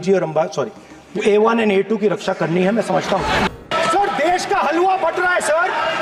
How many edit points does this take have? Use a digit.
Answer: 1